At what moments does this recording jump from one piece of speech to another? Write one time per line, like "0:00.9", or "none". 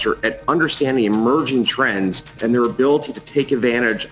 0:02.3